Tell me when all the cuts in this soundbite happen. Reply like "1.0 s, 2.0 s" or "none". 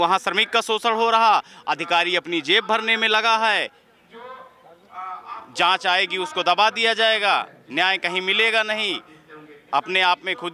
none